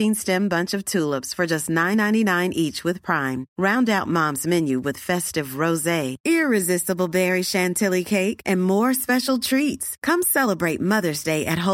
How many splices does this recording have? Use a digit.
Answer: 0